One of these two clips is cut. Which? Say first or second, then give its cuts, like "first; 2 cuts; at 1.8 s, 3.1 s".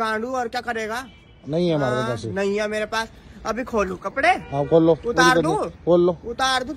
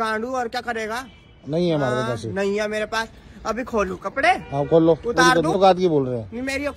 second; 1 cut; at 5.6 s